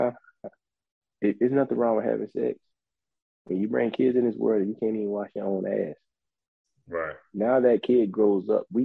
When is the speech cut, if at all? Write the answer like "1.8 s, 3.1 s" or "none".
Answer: none